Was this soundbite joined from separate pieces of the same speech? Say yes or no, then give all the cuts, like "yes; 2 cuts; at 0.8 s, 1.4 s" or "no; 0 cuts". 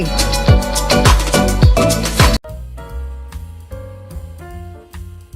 no; 0 cuts